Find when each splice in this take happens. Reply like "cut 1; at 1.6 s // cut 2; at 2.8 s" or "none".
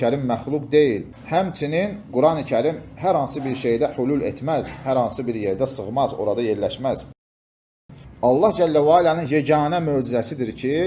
cut 1; at 1.1 s // cut 2; at 7.6 s